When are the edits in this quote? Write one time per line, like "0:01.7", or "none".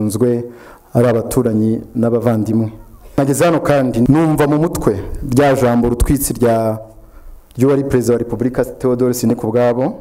0:03.2
0:04.1